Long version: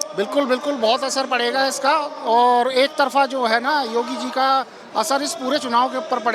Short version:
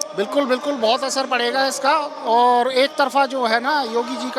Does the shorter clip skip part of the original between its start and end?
no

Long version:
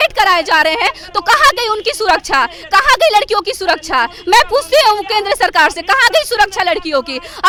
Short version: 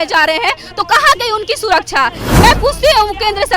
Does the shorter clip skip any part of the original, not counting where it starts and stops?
yes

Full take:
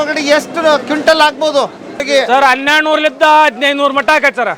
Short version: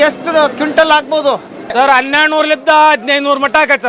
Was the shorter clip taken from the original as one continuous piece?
no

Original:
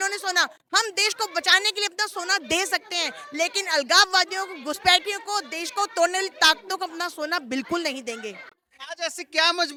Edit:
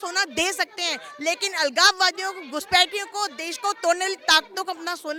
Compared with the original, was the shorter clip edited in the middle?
no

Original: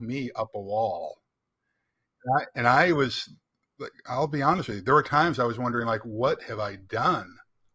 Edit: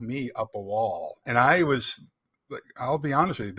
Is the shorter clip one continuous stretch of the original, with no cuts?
no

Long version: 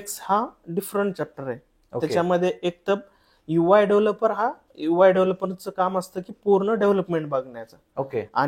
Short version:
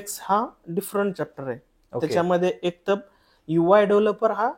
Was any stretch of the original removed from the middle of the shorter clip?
no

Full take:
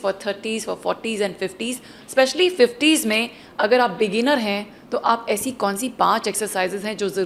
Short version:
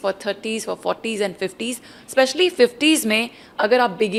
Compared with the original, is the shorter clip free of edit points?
yes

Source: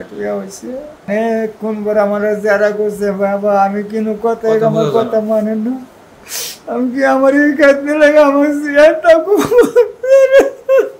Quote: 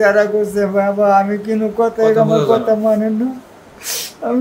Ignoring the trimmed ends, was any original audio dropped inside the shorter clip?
no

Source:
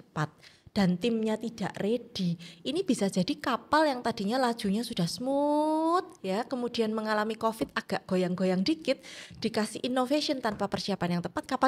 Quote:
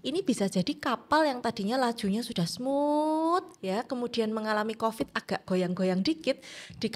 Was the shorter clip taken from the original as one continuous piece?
yes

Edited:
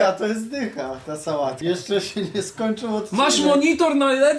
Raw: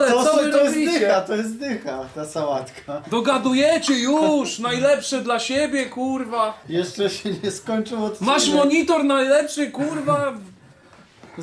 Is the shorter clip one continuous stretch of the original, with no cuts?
no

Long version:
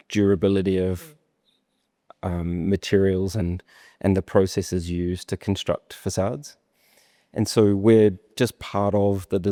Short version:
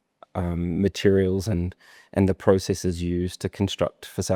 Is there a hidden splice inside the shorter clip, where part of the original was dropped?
no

